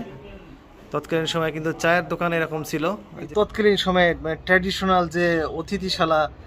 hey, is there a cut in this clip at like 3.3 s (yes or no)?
yes